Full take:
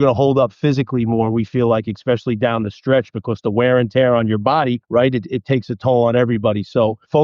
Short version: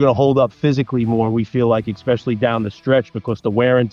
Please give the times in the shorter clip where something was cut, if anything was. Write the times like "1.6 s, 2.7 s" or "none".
none